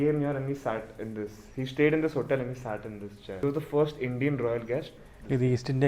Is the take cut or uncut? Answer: cut